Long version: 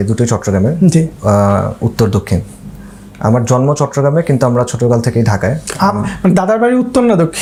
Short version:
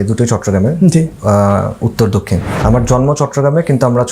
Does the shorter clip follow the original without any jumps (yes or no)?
no